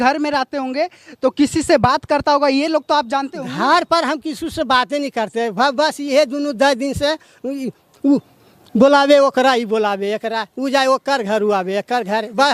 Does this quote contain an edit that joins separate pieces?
no; 0 cuts

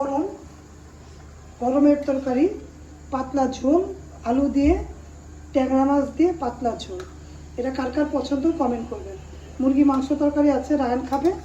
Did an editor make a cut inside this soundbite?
no; 0 cuts

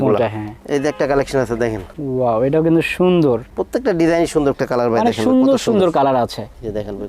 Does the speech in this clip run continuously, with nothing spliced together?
no; 1 cut; at 4.5 s

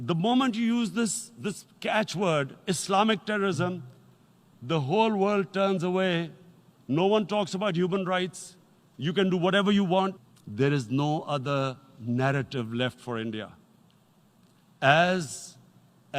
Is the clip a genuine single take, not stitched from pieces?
no; 1 cut; at 10.2 s

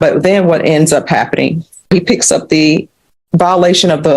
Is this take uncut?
no; 1 cut; at 1.9 s

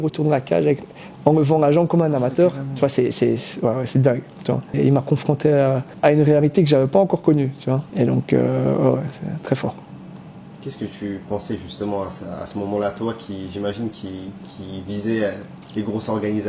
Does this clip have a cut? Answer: no; 0 cuts

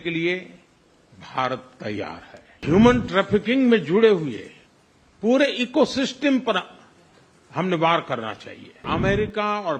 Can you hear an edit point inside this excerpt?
yes; 2 cuts; at 2.6 s, 8.8 s

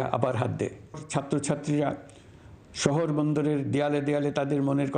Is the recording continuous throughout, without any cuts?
no; 1 cut; at 1.0 s

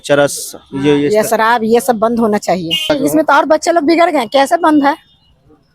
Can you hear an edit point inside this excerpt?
yes; 1 cut; at 2.8 s

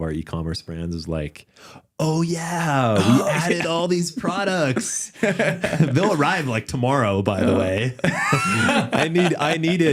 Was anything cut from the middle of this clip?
no; 0 cuts

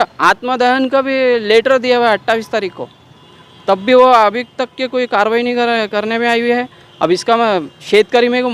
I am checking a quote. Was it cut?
no; 0 cuts

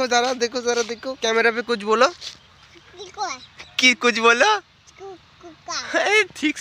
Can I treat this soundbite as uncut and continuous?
yes; 0 cuts

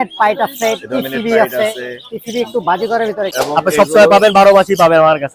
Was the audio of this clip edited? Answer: yes; 1 cut; at 3.3 s

